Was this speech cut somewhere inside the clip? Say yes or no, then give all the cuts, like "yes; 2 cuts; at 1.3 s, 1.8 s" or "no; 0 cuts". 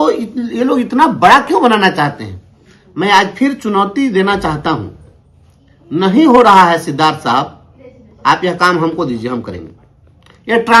no; 0 cuts